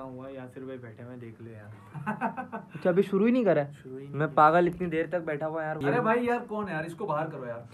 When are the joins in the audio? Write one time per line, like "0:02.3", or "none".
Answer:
0:05.8